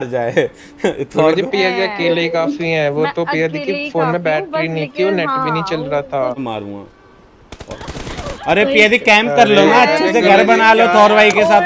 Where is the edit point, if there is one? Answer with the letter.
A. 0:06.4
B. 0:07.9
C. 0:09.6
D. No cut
A